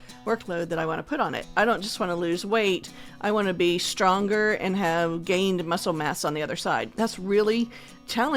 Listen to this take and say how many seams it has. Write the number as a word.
two